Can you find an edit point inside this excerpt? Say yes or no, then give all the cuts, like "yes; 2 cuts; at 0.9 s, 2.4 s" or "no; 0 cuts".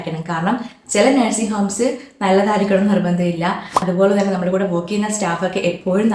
yes; 1 cut; at 3.9 s